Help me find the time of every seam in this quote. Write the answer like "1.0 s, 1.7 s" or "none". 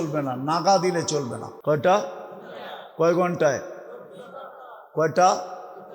1.4 s